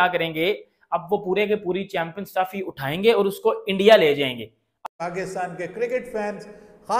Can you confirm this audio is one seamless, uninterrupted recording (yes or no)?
no